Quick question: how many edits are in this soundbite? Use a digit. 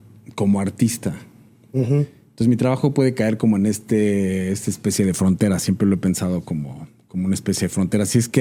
0